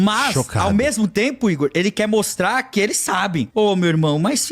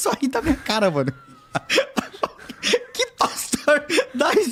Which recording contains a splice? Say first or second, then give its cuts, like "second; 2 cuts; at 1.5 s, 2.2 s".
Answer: first; 1 cut; at 3.5 s